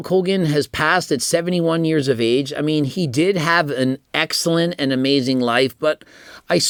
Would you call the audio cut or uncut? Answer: uncut